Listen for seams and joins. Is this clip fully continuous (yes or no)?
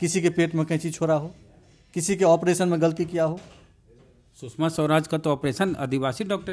yes